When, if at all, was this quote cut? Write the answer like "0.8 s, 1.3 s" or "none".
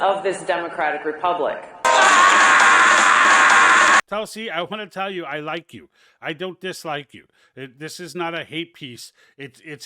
4.0 s

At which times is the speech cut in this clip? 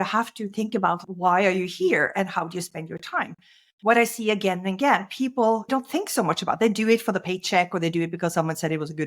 1.0 s, 5.7 s

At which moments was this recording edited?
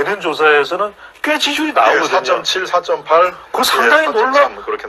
none

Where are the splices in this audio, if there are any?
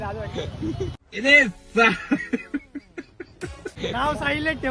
1.0 s, 3.8 s

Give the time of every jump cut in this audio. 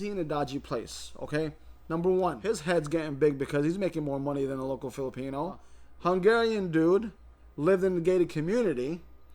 2.5 s, 5.8 s

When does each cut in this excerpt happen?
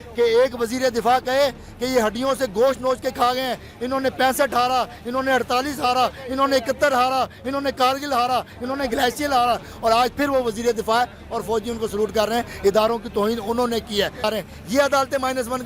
14.3 s

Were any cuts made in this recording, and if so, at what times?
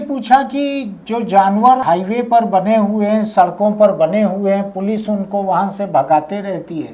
1.8 s

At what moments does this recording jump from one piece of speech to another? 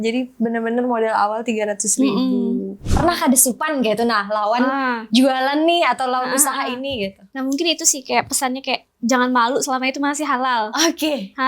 2.8 s

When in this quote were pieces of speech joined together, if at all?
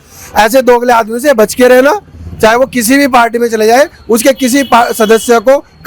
none

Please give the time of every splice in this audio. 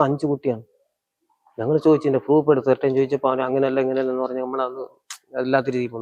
none

